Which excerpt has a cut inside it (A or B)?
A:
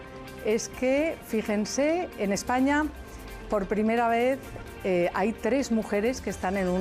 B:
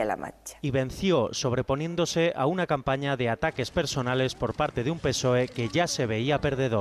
A